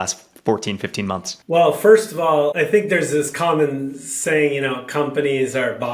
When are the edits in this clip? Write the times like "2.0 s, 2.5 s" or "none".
1.3 s, 2.5 s